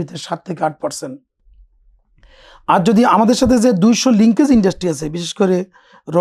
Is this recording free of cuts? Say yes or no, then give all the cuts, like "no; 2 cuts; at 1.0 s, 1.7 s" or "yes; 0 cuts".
yes; 0 cuts